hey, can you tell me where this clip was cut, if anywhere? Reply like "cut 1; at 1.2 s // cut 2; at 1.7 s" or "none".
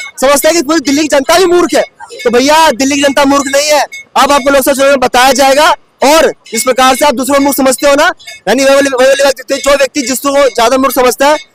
none